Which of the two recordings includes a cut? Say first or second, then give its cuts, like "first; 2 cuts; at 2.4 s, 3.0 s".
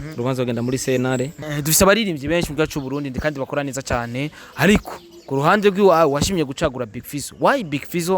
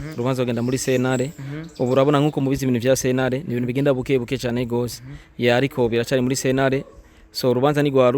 first; 1 cut; at 1.4 s